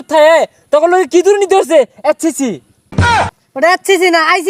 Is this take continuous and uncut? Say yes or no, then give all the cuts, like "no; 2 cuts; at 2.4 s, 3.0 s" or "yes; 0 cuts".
yes; 0 cuts